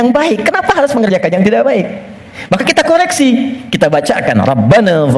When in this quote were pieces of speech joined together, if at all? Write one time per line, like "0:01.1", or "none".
none